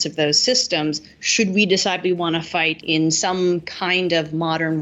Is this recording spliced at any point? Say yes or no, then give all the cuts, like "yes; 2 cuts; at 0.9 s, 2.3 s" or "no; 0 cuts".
yes; 1 cut; at 2.8 s